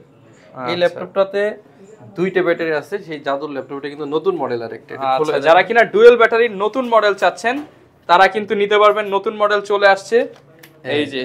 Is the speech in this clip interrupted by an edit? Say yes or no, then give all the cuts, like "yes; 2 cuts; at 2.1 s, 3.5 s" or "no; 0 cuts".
no; 0 cuts